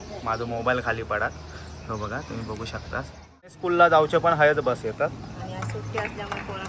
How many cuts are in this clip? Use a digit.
1